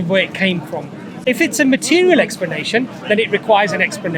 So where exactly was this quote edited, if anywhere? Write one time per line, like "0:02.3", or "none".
0:01.1